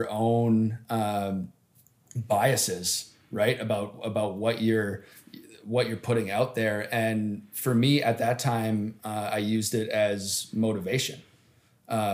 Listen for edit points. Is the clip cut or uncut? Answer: uncut